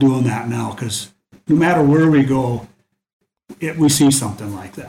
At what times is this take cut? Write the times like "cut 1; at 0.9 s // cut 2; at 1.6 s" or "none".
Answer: none